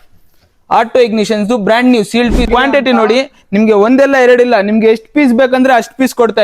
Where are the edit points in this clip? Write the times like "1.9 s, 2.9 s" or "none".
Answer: 2.5 s